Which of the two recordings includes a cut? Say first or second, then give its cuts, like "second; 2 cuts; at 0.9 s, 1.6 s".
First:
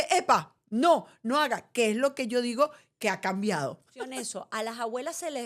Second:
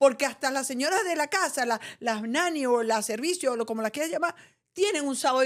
first; 1 cut; at 4.1 s